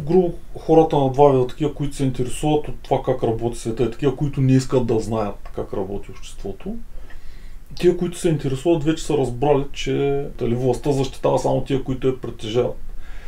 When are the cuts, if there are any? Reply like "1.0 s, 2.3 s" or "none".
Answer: 10.4 s